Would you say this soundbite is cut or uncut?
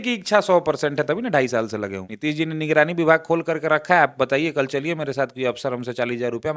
cut